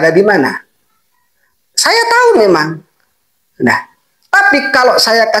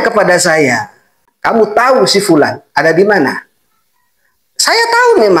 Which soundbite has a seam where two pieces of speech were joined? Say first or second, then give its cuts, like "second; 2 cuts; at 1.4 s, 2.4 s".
second; 1 cut; at 1.3 s